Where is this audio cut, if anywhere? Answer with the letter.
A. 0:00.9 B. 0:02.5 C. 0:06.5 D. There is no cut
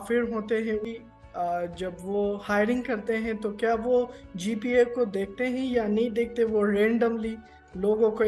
A